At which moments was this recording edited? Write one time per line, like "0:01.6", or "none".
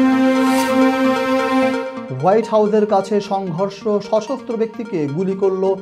0:01.9